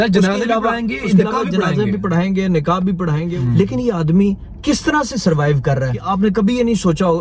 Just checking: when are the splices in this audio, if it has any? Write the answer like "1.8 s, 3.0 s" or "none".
3.3 s, 6.0 s